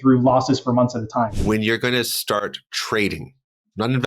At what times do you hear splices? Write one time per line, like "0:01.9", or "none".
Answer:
0:01.3